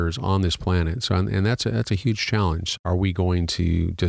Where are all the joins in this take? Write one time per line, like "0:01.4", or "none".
0:02.8